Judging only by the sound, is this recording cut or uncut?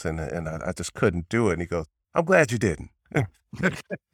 cut